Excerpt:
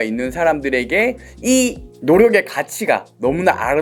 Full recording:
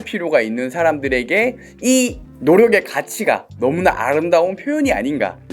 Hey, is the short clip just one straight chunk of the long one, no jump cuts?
yes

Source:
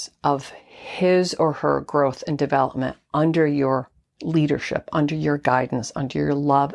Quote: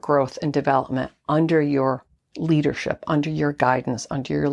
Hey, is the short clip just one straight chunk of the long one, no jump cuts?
yes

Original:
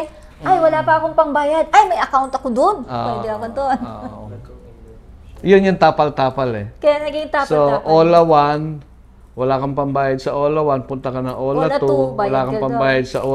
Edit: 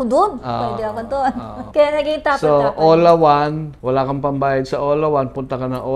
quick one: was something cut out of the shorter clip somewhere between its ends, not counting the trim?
yes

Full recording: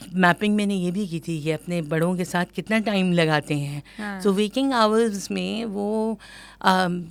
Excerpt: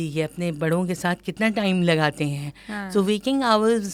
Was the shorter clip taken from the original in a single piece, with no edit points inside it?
yes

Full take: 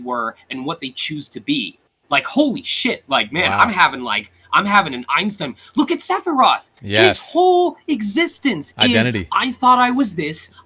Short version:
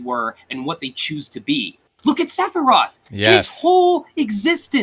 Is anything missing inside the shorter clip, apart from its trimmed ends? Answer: yes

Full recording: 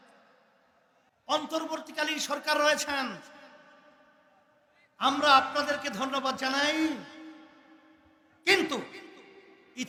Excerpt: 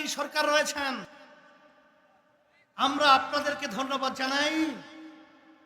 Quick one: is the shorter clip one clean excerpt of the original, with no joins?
no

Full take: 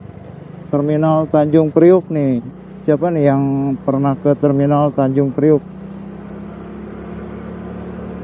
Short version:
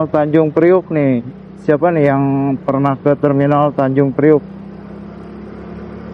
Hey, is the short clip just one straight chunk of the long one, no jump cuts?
no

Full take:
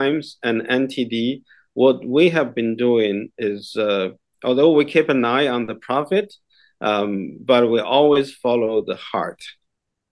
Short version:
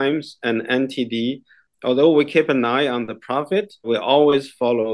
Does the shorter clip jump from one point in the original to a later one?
yes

